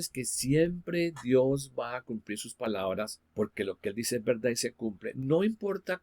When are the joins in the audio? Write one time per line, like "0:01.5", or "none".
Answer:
0:03.2